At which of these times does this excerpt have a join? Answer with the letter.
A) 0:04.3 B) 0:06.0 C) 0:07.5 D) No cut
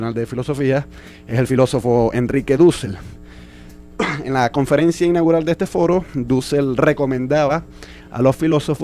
D